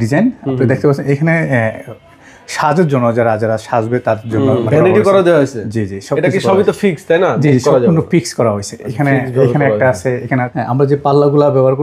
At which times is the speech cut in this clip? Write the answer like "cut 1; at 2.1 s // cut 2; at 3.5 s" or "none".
cut 1; at 4.7 s // cut 2; at 10.3 s